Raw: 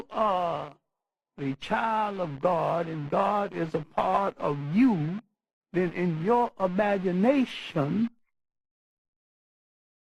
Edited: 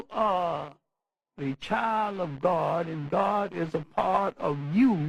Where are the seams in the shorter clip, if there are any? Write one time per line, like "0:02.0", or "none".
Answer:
none